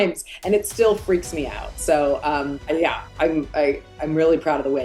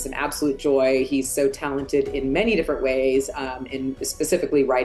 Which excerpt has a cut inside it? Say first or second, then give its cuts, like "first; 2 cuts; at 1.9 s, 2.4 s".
first; 1 cut; at 3.1 s